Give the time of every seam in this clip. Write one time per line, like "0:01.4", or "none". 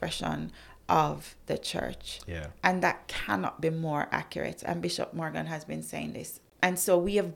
0:06.4